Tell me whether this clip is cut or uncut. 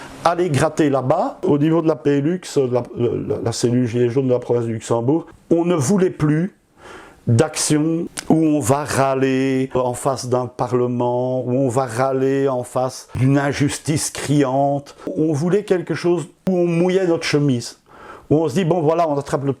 cut